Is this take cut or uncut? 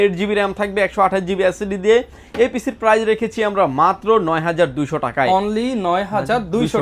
uncut